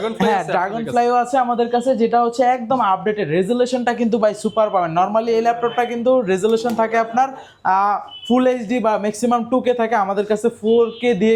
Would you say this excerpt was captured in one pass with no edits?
yes; 0 cuts

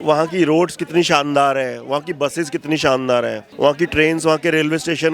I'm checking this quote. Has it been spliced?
yes; 1 cut; at 3.4 s

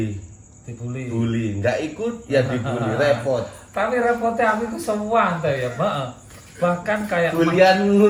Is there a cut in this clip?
no; 0 cuts

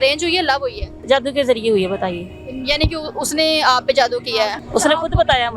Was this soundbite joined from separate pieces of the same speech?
yes; 2 cuts; at 1.0 s, 4.6 s

